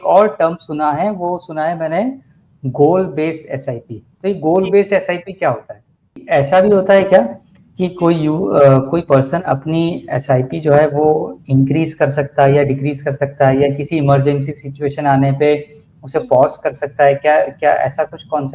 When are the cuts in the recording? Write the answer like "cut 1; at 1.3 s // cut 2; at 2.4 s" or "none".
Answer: cut 1; at 6.2 s